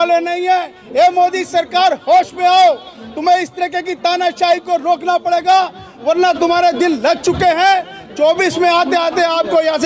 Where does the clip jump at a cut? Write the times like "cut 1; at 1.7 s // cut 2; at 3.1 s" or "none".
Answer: none